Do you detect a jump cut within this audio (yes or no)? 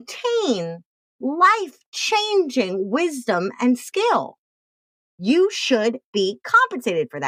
no